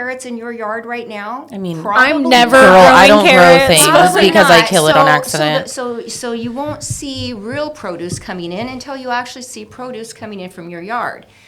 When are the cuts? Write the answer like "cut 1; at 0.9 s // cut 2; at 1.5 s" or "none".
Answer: none